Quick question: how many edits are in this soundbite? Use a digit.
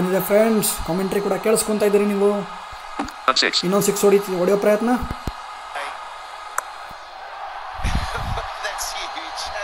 1